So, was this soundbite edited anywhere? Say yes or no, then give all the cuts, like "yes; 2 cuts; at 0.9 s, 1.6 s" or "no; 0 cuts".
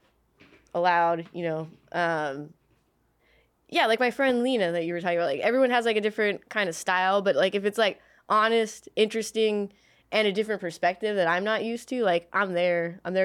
no; 0 cuts